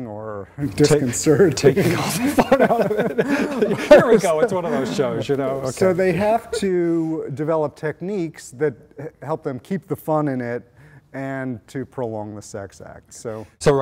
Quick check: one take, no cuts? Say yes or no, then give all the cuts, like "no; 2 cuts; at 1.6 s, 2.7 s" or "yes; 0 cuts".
yes; 0 cuts